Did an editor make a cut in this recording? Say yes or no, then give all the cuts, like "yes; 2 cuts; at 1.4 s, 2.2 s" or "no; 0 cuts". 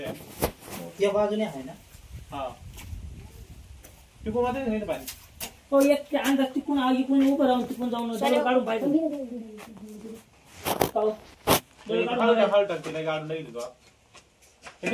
no; 0 cuts